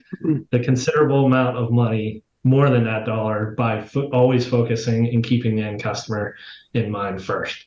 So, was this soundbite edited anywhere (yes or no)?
no